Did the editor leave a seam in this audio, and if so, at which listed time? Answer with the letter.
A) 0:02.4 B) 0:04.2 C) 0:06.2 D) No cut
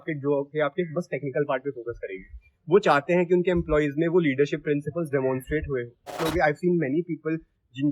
C